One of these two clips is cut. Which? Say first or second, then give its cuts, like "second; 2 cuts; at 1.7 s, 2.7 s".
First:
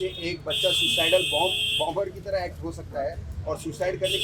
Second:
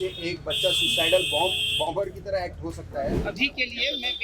second; 1 cut; at 3.2 s